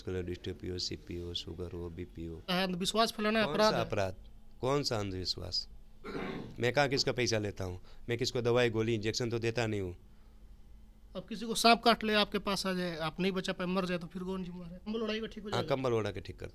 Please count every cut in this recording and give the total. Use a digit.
2